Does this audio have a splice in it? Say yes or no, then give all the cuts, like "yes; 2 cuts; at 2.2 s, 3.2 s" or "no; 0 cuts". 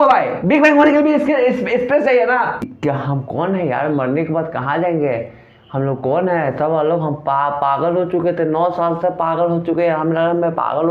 yes; 1 cut; at 2.7 s